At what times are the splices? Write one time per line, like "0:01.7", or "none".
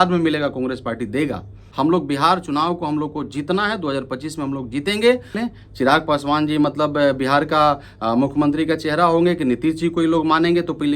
0:01.6
0:05.4